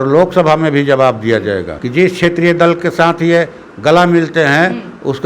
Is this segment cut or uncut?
cut